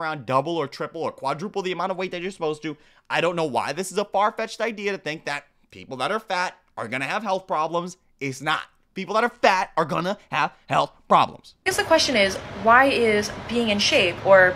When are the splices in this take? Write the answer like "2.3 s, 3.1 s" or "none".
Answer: 11.6 s